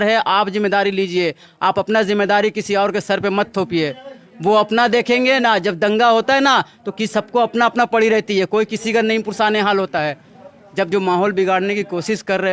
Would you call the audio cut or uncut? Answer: cut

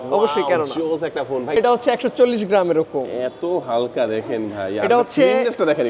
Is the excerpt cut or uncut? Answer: cut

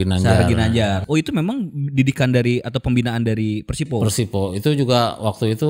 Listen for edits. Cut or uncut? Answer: cut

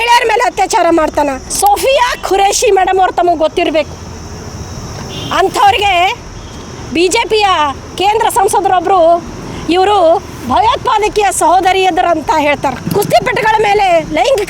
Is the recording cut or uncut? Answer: cut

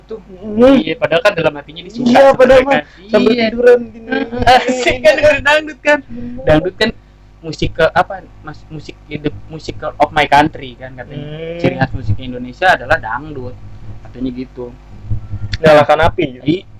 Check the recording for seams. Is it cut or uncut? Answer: uncut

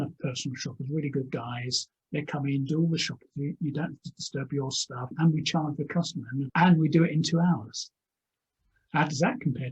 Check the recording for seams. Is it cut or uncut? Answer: cut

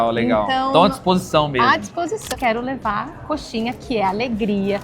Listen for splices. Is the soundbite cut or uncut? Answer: cut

